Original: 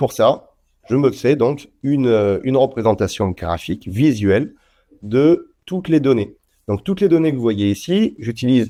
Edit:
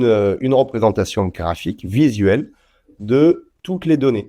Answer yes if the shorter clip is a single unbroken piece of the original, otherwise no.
yes